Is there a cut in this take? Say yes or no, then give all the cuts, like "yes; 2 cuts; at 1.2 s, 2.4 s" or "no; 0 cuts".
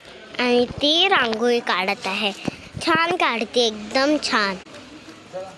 yes; 1 cut; at 4.6 s